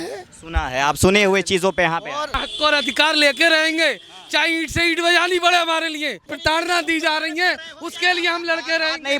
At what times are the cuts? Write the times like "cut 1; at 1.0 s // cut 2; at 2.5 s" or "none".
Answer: cut 1; at 2.3 s // cut 2; at 6.3 s